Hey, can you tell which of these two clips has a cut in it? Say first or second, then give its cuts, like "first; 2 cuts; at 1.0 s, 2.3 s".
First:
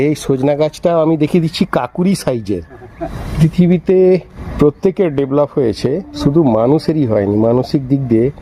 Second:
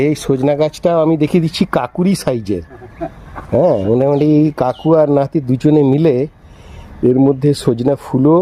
first; 3 cuts; at 3.2 s, 4.4 s, 6.1 s